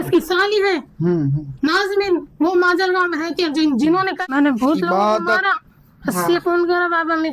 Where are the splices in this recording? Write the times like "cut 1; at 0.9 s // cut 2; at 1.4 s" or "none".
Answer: cut 1; at 4.2 s

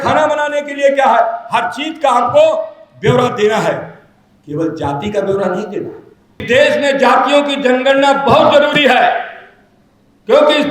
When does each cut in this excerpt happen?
cut 1; at 6.4 s

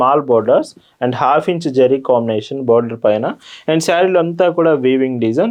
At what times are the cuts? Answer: none

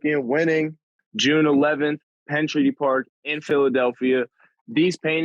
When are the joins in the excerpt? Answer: cut 1; at 1.1 s

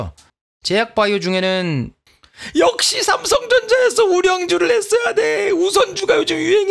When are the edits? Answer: cut 1; at 2.1 s

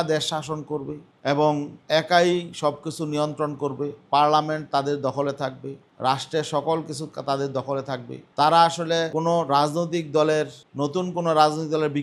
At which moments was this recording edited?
none

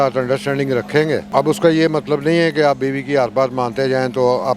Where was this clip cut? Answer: cut 1; at 1.3 s

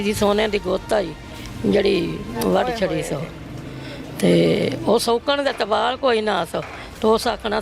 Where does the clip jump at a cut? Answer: none

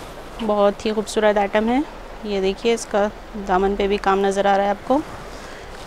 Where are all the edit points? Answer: none

